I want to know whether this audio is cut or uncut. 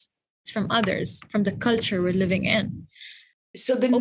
uncut